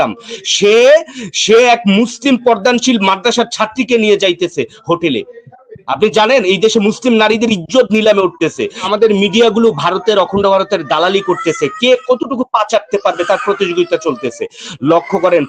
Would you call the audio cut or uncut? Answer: cut